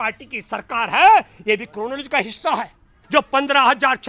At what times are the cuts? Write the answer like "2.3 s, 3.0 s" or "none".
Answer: 2.9 s